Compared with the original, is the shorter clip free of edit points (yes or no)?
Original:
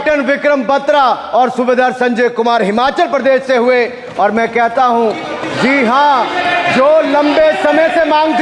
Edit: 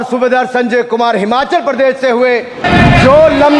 no